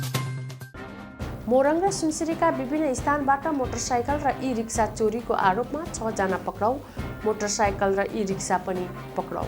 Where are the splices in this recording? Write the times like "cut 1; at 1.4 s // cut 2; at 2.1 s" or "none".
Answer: none